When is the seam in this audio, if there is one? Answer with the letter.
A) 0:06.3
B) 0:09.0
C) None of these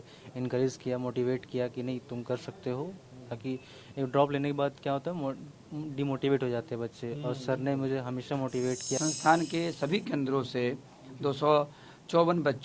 B